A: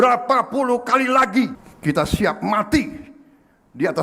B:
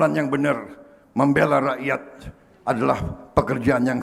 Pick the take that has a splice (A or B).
A